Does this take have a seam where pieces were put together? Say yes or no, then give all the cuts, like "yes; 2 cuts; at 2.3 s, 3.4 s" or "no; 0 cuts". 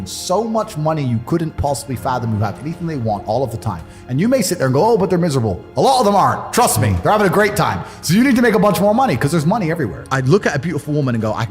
yes; 1 cut; at 10.0 s